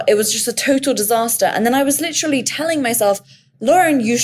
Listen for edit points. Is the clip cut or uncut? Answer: uncut